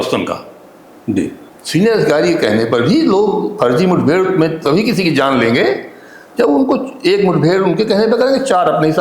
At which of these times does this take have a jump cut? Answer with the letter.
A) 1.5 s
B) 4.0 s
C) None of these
A